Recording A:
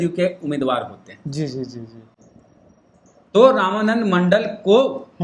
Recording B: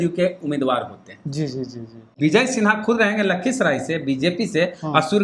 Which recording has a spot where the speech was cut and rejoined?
B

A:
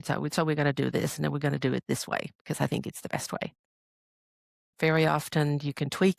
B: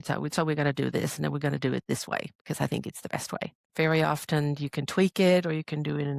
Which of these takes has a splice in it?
B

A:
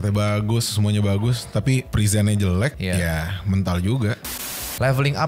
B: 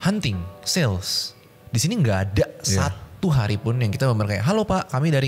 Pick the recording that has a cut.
A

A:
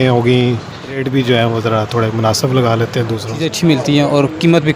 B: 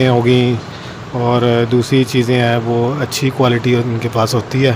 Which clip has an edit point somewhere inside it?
A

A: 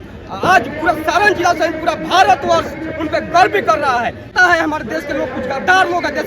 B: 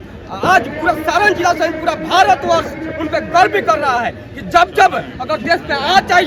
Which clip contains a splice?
A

